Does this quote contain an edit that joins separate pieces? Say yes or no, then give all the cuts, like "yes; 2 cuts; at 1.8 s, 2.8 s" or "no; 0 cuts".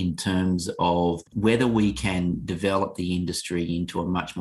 yes; 1 cut; at 1.3 s